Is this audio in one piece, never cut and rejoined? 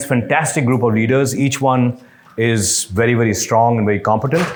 yes; 0 cuts

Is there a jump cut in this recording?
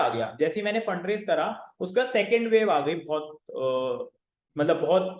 no; 0 cuts

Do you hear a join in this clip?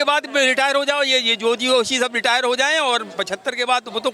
no; 0 cuts

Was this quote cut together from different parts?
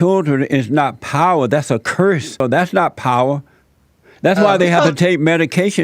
yes; 1 cut; at 2.4 s

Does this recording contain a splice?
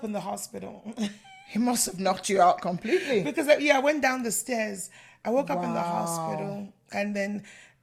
no; 0 cuts

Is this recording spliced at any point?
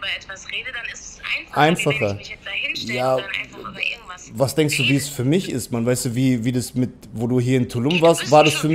no; 0 cuts

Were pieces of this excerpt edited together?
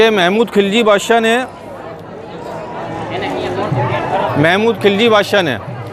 no; 0 cuts

